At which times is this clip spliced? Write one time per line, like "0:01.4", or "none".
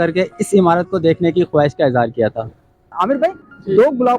0:02.9